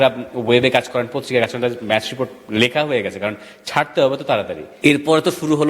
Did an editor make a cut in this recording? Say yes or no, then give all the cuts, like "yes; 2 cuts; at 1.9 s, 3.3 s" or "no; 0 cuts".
yes; 1 cut; at 4.6 s